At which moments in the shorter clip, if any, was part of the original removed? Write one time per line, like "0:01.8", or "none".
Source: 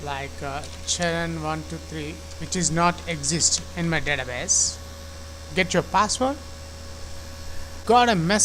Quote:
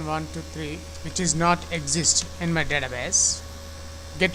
none